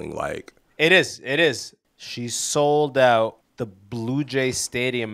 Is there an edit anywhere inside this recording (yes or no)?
yes